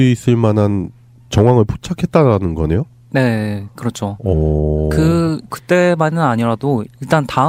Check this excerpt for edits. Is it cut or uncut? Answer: uncut